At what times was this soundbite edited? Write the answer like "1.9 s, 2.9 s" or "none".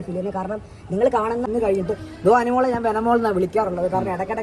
1.5 s